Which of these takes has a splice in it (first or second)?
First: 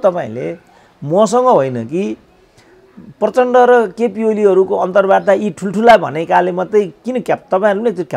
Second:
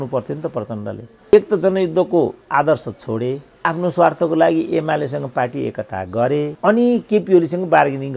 second